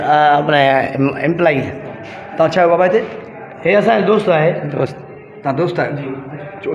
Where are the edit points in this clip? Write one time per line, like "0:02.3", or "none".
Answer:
none

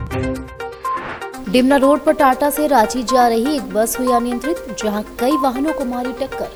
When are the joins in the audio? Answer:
none

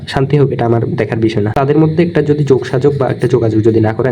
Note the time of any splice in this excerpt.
0:01.5

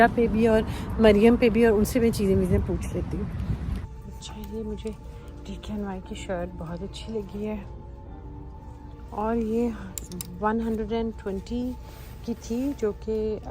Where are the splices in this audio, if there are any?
0:03.8

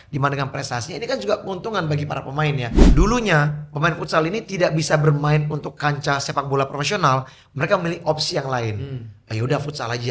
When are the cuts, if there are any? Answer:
0:02.8

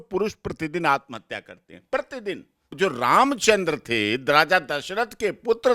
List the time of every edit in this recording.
0:02.7

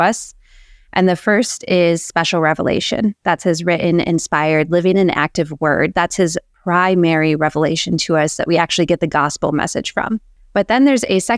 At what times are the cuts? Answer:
0:10.4

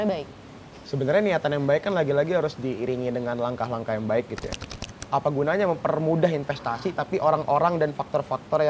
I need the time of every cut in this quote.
0:04.7

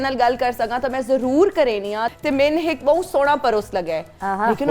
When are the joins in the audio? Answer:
0:02.1

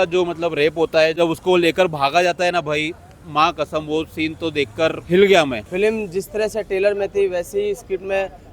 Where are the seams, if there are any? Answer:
0:01.2
0:05.0
0:05.6

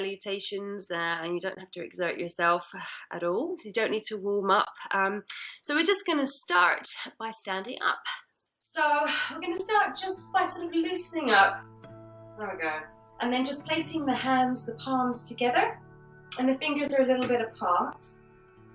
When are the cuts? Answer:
0:09.9

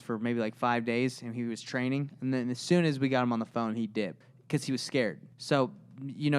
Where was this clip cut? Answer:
0:04.3
0:05.3

